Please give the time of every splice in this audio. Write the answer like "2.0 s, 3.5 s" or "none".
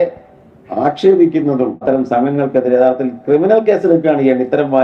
1.8 s